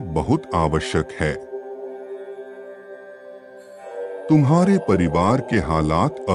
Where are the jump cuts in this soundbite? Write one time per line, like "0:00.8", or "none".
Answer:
none